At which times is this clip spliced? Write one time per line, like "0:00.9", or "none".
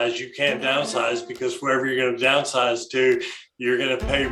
none